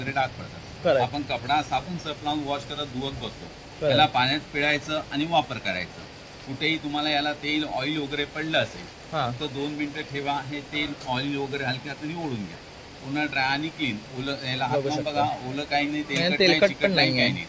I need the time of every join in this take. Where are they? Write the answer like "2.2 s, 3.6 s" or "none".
none